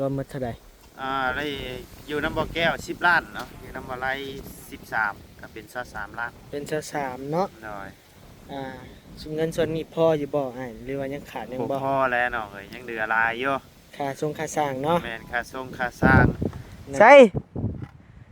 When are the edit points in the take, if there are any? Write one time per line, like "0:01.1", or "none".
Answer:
0:16.0